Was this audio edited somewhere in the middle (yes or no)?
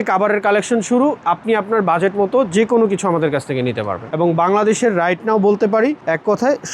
yes